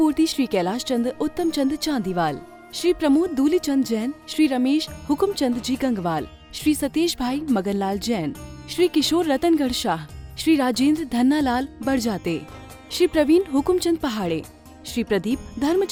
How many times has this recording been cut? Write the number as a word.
zero